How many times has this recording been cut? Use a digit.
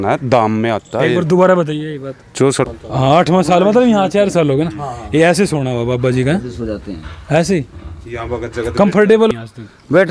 2